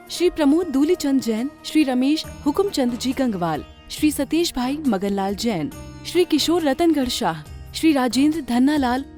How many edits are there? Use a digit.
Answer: 0